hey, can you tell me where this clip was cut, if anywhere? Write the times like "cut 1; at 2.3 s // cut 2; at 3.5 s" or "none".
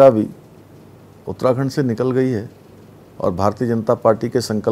none